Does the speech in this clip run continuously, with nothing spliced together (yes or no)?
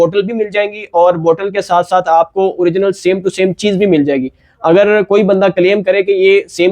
yes